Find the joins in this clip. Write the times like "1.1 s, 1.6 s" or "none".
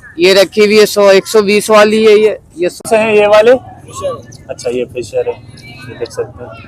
2.8 s